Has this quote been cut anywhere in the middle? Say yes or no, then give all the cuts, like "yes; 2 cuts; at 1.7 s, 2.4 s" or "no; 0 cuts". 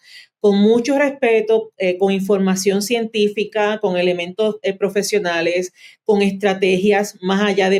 no; 0 cuts